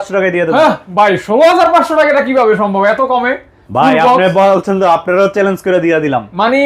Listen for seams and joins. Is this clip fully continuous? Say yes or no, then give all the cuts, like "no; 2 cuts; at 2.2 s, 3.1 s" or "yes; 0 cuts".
yes; 0 cuts